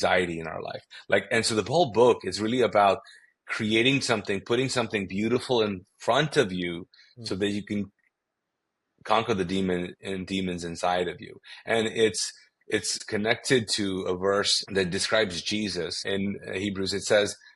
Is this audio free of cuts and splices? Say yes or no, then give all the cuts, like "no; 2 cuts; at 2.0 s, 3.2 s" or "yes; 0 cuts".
no; 3 cuts; at 13.0 s, 14.6 s, 16.0 s